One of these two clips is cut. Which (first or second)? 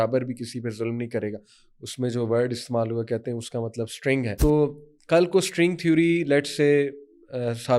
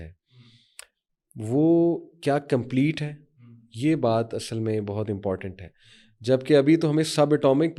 first